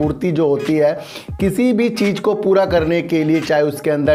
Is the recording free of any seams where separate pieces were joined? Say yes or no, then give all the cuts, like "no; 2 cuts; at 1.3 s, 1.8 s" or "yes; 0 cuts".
yes; 0 cuts